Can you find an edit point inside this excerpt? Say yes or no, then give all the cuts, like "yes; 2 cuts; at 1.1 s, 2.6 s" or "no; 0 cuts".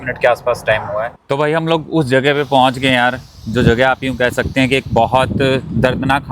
yes; 1 cut; at 1.2 s